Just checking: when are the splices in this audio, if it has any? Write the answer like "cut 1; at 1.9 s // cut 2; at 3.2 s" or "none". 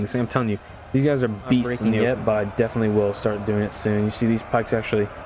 cut 1; at 1.9 s